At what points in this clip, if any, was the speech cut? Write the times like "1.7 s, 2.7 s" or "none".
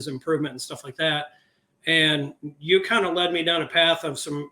none